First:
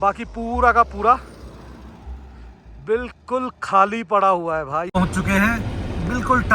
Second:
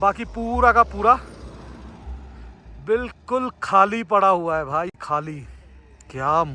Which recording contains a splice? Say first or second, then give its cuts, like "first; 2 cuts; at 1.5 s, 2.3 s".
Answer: first; 1 cut; at 4.9 s